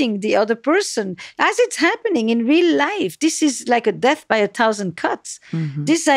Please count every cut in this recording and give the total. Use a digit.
1